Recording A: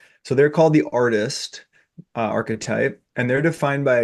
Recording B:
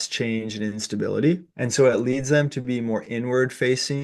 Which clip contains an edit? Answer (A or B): B